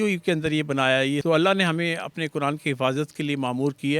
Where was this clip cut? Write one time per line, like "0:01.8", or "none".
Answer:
0:01.2